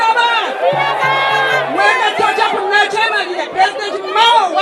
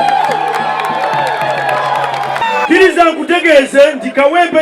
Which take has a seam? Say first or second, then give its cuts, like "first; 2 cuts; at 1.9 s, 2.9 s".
second; 1 cut; at 2.4 s